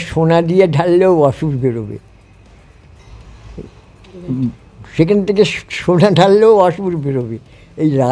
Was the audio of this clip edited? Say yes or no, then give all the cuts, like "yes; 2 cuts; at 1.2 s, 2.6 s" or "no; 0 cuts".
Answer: no; 0 cuts